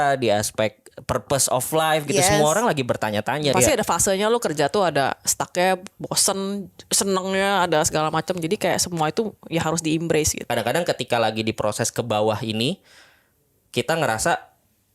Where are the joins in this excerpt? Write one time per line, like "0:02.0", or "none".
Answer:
0:03.5
0:10.5

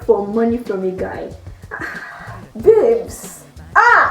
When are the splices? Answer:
none

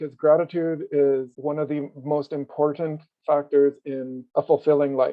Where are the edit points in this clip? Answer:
none

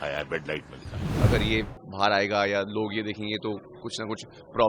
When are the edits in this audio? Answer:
0:01.0

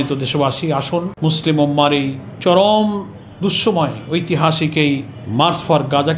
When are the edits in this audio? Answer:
0:01.1
0:02.2
0:05.2

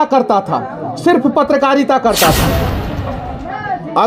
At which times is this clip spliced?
0:02.7

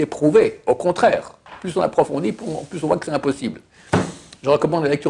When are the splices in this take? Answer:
none

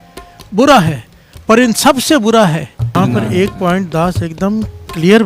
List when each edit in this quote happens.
0:02.9

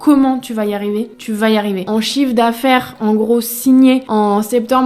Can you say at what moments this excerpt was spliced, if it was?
0:01.2
0:01.8
0:04.1

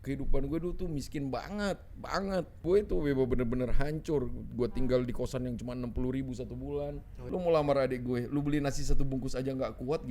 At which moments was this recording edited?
0:02.6
0:07.1

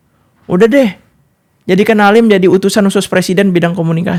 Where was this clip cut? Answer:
none

